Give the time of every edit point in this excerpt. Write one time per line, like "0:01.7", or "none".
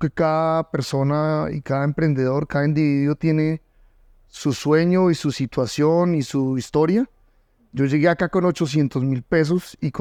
none